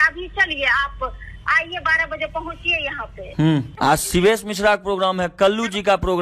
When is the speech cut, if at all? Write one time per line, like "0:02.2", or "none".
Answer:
0:03.7